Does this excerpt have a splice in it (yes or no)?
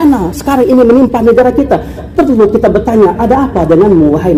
no